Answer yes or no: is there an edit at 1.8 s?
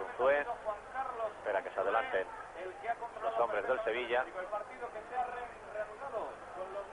yes